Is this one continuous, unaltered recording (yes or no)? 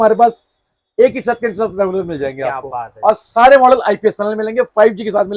yes